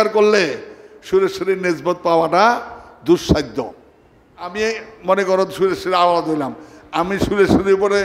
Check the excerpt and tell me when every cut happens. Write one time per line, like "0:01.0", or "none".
0:04.5